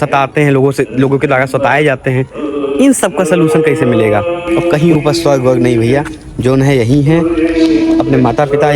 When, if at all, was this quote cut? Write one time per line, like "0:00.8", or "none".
0:04.4

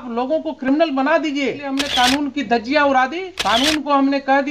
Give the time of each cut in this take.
0:01.8
0:03.3

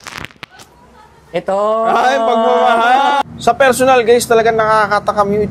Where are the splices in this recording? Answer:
0:03.2

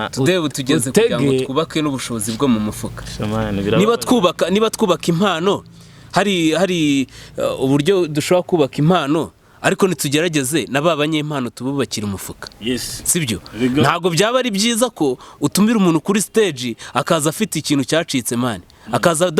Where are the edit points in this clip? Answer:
none

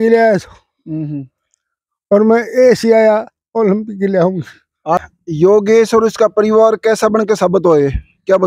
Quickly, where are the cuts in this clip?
0:05.0

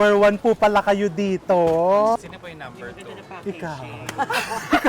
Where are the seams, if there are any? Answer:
0:02.2

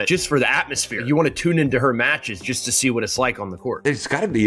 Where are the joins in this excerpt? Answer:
none

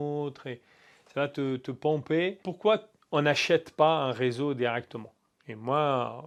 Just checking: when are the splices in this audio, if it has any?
none

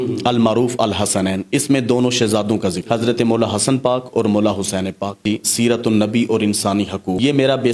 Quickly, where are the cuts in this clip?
0:05.2

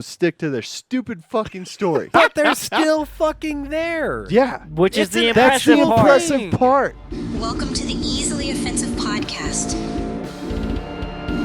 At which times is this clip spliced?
0:07.0

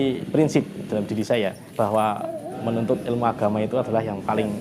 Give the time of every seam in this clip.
none

